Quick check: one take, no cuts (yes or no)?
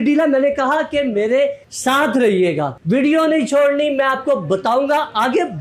yes